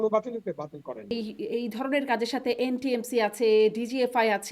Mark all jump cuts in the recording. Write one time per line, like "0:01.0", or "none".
0:01.1